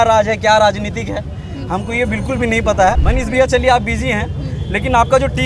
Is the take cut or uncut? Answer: cut